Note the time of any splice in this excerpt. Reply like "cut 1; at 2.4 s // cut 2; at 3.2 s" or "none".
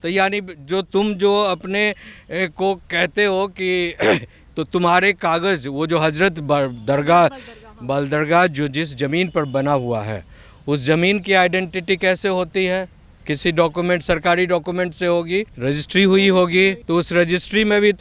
cut 1; at 15.5 s // cut 2; at 16.8 s